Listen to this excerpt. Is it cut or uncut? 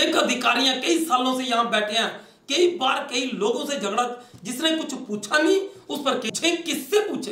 cut